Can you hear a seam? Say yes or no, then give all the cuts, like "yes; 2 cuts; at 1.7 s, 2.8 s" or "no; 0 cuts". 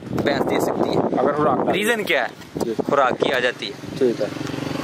no; 0 cuts